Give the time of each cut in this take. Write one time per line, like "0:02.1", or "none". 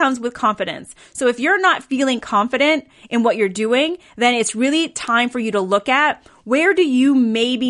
none